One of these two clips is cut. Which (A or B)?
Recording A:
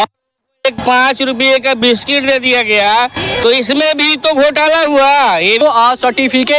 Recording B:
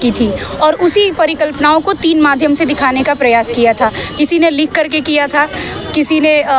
A